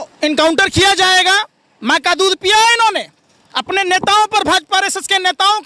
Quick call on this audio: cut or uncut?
uncut